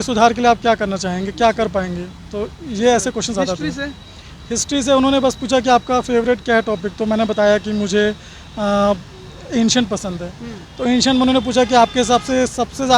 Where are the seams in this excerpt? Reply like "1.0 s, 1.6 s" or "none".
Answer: none